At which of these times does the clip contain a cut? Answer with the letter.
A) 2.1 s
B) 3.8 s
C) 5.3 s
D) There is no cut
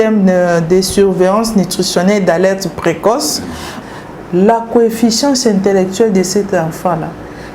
B